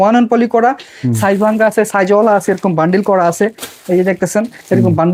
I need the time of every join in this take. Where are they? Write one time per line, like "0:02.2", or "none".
none